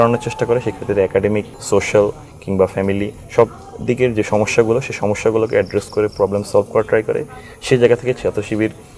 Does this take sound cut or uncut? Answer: cut